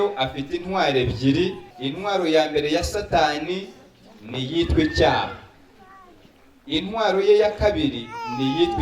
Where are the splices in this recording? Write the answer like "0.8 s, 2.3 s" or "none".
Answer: 1.6 s